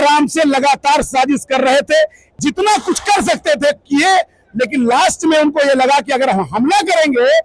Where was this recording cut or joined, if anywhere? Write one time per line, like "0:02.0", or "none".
0:02.3